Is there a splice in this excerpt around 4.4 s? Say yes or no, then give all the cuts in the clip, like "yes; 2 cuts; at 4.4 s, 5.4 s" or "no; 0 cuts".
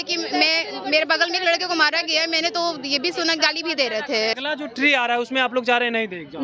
yes; 1 cut; at 4.4 s